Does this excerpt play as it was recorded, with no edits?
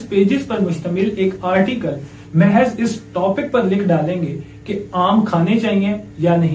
yes; 0 cuts

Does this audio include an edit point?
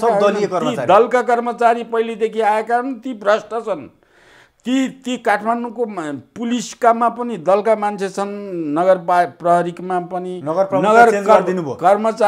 no; 0 cuts

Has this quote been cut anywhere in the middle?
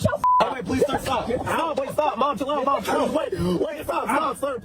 no; 0 cuts

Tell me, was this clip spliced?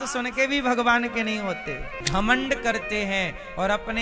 yes; 1 cut; at 1.9 s

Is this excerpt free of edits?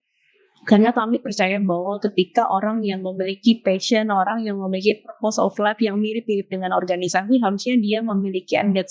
no; 1 cut; at 2.0 s

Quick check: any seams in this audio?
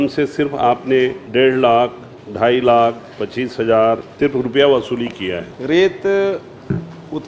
yes; 3 cuts; at 1.2 s, 4.1 s, 5.5 s

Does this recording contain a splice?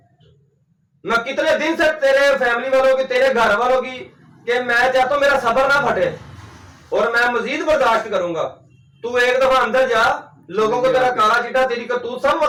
no; 0 cuts

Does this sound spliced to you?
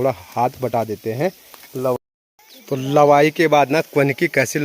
yes; 1 cut; at 2.0 s

